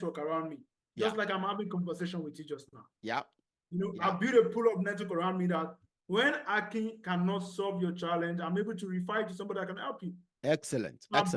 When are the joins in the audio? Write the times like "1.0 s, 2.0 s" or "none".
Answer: none